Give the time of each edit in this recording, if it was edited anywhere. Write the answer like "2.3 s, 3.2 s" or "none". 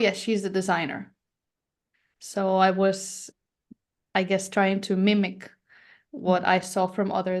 3.3 s